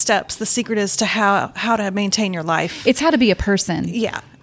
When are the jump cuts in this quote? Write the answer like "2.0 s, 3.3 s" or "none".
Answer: none